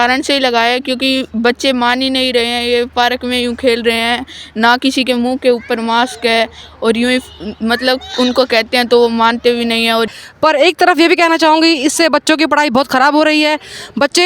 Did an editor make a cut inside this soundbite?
yes; 1 cut; at 10.1 s

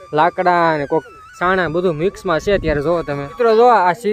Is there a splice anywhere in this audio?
yes; 1 cut; at 3.2 s

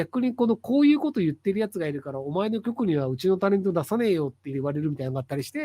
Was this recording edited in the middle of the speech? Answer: yes; 1 cut; at 4.5 s

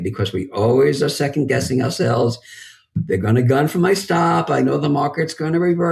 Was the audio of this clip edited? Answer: no; 0 cuts

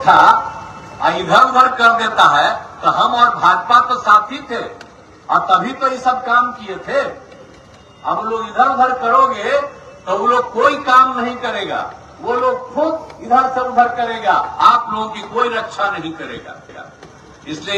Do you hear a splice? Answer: no; 0 cuts

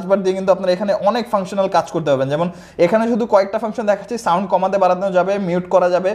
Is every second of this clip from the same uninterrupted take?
yes; 0 cuts

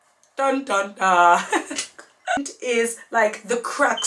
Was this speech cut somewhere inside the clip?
no; 0 cuts

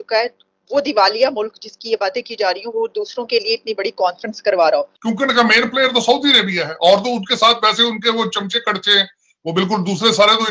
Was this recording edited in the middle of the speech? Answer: no; 0 cuts

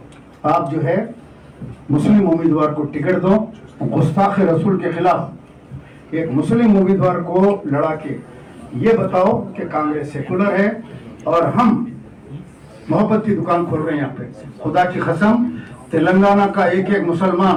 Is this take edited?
no; 0 cuts

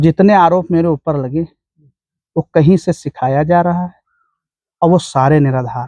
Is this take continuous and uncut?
yes; 0 cuts

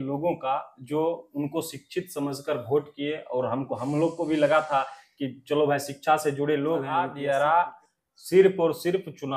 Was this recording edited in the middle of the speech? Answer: yes; 1 cut; at 6.9 s

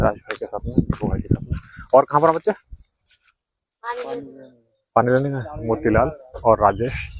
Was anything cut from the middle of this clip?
yes; 1 cut; at 5.5 s

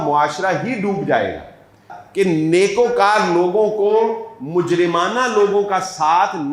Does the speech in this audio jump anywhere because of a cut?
yes; 1 cut; at 1.9 s

